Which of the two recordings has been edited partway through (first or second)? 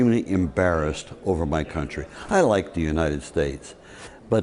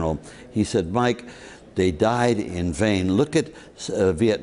first